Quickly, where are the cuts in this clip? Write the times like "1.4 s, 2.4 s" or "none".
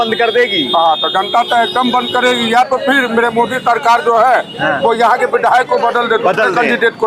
none